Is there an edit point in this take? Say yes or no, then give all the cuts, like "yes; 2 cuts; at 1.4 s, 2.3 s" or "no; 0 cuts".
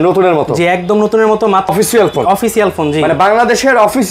yes; 1 cut; at 1.7 s